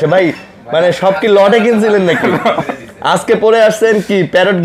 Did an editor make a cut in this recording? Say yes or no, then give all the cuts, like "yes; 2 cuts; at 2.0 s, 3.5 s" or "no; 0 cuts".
no; 0 cuts